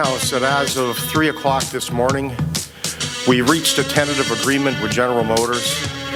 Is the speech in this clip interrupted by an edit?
no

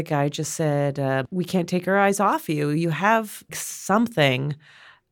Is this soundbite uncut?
no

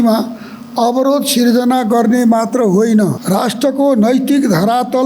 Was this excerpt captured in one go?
no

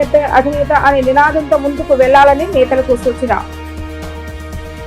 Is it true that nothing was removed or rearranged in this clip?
yes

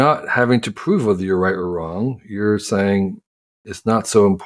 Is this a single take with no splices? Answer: yes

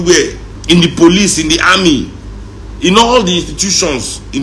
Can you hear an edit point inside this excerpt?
no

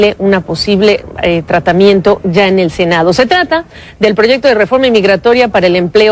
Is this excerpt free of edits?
no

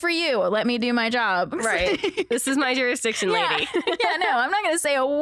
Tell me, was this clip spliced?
no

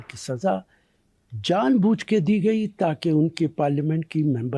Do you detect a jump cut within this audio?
no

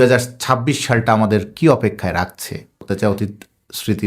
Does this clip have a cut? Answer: yes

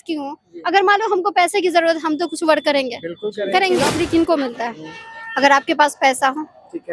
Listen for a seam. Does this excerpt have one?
yes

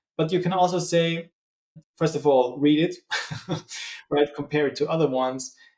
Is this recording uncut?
yes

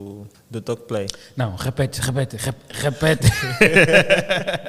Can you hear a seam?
no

